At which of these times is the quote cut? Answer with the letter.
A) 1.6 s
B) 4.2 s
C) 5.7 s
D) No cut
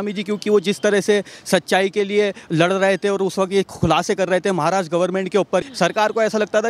C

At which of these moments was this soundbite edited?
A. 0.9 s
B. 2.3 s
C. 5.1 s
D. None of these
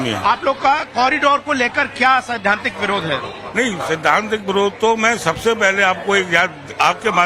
D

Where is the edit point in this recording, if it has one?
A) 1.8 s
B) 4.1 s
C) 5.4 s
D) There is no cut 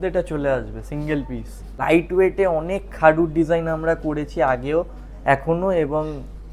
A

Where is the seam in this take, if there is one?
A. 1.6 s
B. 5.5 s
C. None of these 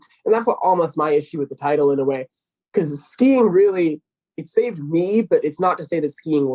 C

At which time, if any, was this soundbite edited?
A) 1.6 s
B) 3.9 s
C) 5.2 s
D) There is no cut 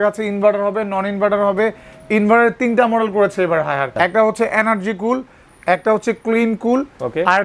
B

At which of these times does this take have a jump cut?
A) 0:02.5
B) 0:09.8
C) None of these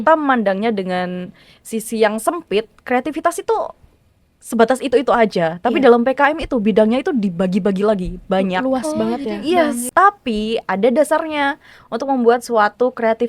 B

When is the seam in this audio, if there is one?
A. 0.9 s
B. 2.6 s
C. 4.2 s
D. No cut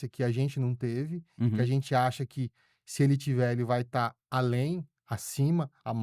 C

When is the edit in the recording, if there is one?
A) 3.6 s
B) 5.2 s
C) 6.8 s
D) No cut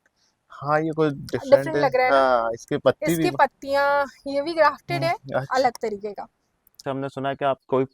C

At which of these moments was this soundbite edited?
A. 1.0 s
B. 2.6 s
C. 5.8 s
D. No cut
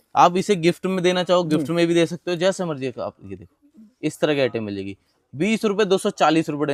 D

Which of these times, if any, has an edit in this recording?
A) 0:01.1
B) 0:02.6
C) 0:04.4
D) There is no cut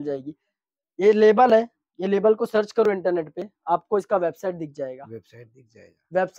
D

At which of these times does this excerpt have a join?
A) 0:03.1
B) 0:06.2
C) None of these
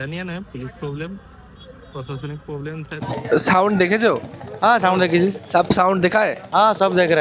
A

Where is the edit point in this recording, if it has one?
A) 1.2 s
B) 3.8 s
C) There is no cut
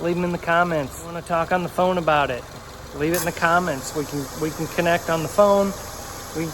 A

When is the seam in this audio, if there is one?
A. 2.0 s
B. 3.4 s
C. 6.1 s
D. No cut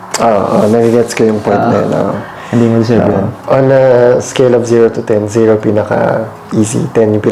B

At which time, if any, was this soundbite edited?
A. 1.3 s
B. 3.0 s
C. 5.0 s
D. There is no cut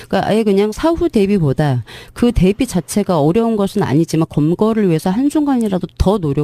B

